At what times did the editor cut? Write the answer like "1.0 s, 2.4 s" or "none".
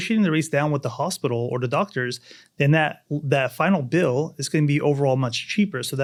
none

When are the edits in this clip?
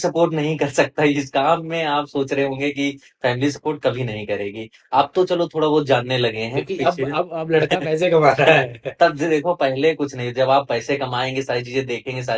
none

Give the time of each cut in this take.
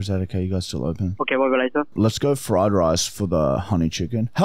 1.1 s, 1.9 s

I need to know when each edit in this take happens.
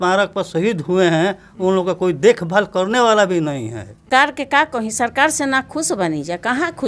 4.1 s

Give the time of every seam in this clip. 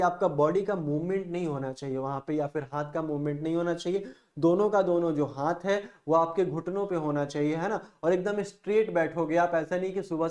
none

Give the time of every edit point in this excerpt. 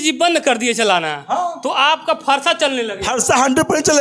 none

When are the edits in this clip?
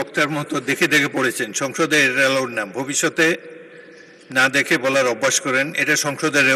none

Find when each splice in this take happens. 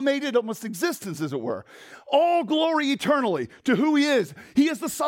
none

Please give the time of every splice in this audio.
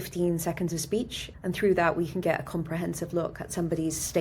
1.2 s

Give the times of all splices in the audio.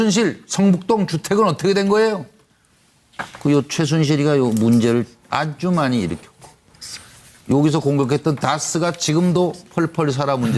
none

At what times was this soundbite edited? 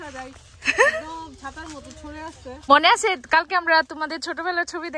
2.7 s

